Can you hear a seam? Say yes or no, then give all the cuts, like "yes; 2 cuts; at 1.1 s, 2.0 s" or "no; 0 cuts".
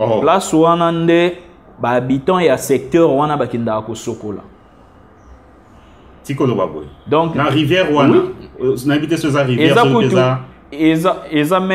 no; 0 cuts